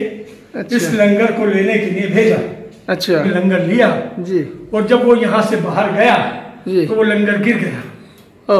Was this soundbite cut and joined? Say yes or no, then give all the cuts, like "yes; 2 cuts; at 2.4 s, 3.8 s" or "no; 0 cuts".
yes; 1 cut; at 3.2 s